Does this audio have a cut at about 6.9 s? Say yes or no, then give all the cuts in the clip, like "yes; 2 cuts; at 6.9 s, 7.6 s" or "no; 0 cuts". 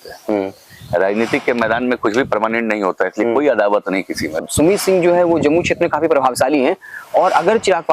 no; 1 cut; at 4.4 s